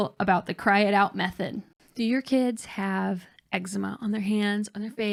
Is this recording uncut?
yes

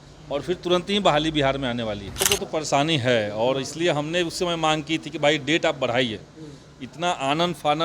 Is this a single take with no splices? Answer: no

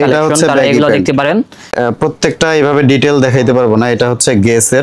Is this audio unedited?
no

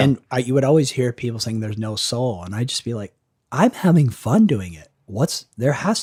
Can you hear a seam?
no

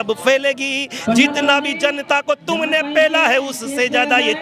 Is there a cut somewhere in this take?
no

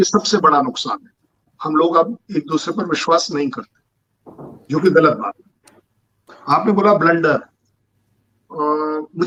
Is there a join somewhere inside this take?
no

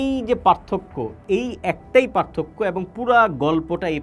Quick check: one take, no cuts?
yes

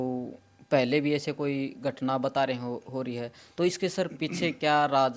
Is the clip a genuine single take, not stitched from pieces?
yes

